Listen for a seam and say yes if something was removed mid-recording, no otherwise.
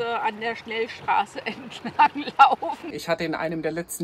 yes